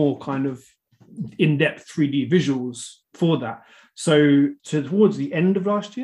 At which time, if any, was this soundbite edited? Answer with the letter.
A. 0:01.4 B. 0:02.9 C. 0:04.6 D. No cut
C